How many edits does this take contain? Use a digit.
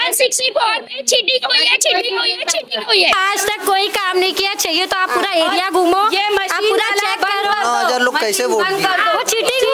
1